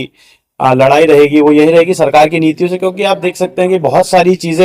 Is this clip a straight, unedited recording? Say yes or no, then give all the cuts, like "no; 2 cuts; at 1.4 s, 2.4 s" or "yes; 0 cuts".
yes; 0 cuts